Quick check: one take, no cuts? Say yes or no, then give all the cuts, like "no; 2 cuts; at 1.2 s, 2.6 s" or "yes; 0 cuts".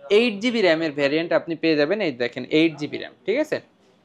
yes; 0 cuts